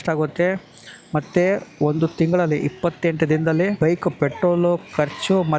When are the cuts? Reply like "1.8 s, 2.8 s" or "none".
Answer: 3.8 s